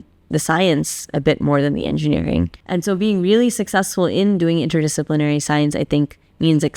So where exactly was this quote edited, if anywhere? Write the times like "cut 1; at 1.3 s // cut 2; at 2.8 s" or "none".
cut 1; at 2.6 s